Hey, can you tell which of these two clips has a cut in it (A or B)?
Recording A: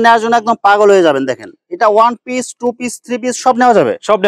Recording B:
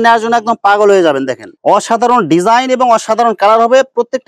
B